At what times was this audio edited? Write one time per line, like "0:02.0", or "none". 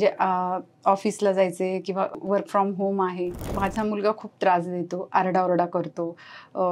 0:02.1
0:03.5